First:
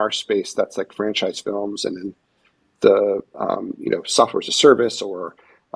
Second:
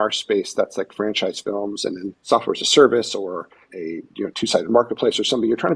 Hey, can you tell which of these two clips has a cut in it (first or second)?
second